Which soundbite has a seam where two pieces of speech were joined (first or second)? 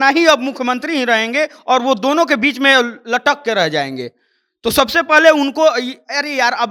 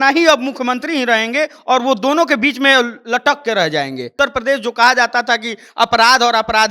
second